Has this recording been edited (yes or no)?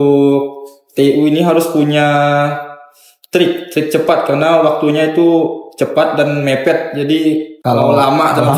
no